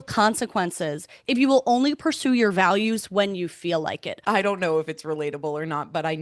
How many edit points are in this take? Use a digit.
2